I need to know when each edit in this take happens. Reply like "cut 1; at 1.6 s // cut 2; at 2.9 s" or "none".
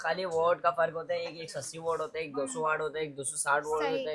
none